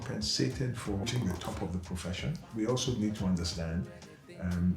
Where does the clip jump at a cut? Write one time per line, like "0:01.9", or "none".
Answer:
0:01.0
0:02.5